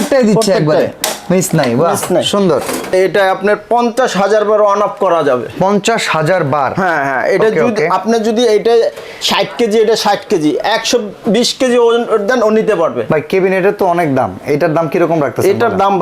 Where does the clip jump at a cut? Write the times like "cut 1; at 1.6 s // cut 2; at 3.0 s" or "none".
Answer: cut 1; at 2.9 s // cut 2; at 13.0 s